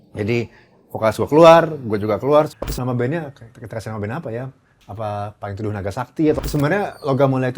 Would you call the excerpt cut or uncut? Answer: cut